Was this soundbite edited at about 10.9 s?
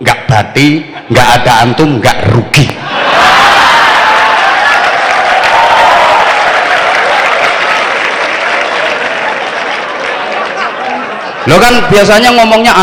no; 0 cuts

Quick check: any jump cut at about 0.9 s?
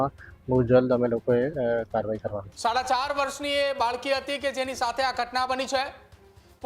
no; 1 cut; at 2.5 s

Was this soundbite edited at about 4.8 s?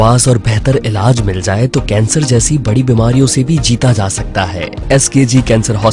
yes; 1 cut; at 4.8 s

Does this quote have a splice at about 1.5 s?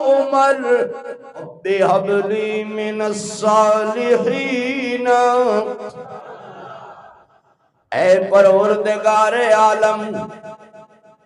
yes; 1 cut; at 1.5 s

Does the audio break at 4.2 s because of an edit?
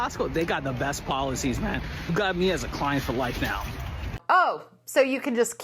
yes; 2 cuts; at 2.1 s, 4.2 s

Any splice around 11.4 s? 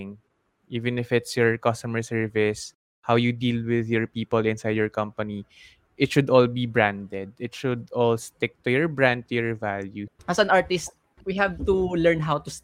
no; 1 cut; at 10.1 s

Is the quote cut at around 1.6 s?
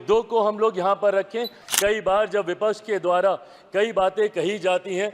yes; 1 cut; at 1.6 s

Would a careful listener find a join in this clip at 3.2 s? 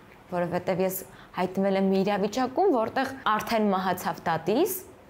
yes; 1 cut; at 3.2 s

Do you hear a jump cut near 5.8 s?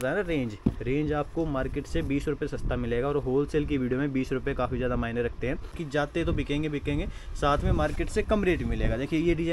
yes; 1 cut; at 5.8 s

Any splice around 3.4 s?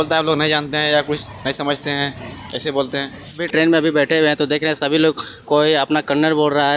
yes; 1 cut; at 3.4 s

